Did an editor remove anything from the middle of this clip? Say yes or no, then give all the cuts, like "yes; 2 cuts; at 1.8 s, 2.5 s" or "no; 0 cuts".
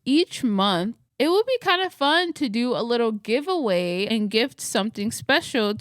yes; 1 cut; at 1.0 s